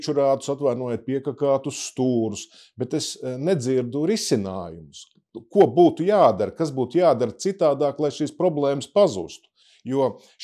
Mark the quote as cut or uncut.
uncut